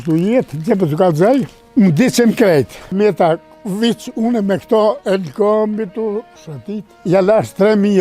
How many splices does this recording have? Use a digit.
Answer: 3